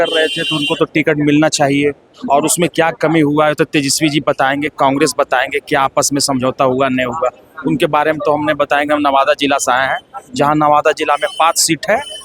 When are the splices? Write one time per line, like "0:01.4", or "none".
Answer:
none